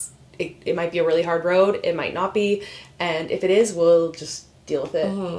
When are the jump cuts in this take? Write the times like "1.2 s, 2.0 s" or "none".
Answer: none